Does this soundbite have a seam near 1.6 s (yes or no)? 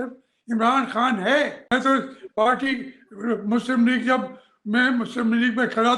yes